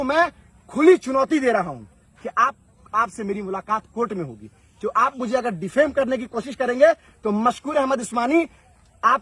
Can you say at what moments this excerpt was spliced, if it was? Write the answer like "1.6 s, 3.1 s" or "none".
none